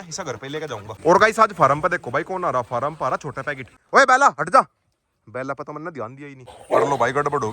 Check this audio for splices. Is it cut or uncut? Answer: cut